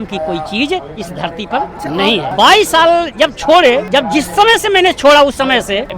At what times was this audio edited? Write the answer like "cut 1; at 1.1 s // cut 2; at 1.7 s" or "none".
cut 1; at 2.3 s // cut 2; at 3.8 s